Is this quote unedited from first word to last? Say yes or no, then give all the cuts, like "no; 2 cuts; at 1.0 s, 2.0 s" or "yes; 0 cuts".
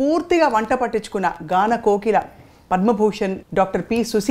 no; 1 cut; at 3.4 s